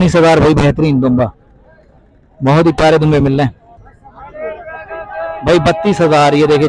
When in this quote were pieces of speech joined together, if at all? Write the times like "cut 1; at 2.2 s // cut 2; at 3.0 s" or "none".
cut 1; at 3.6 s